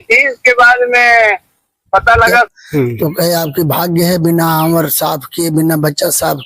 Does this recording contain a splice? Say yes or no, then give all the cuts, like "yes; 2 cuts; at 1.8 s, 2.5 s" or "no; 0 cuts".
yes; 1 cut; at 2.5 s